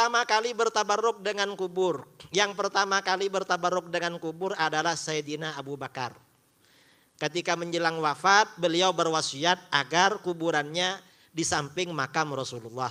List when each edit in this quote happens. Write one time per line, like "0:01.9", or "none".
none